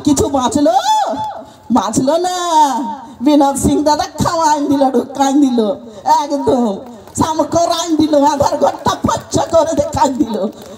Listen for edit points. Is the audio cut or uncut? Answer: uncut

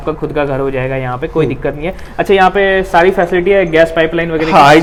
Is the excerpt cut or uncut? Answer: uncut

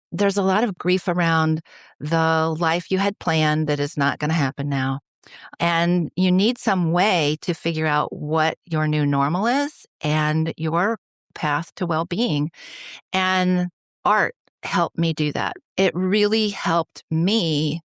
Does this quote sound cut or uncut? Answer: cut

